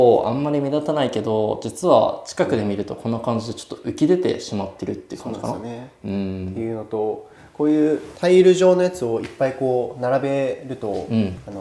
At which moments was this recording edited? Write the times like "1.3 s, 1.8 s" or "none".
none